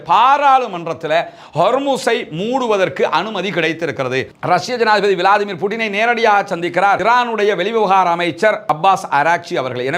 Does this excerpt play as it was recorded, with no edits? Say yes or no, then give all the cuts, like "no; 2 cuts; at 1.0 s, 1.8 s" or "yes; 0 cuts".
no; 1 cut; at 4.4 s